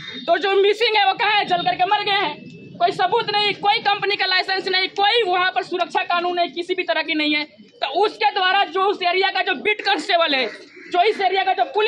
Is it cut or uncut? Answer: uncut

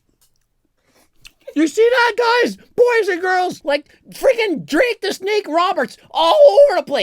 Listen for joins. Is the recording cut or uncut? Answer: cut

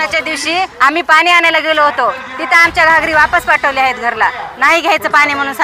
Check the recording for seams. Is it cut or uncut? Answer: uncut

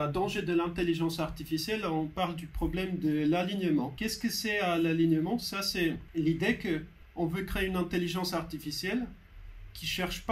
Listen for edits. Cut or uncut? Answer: cut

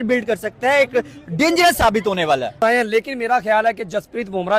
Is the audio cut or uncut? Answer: cut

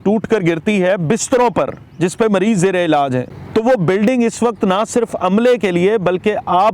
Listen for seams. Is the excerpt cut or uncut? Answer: cut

